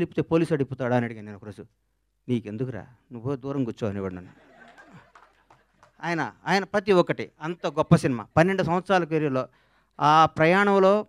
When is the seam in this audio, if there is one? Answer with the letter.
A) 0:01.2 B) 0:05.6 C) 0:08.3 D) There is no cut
D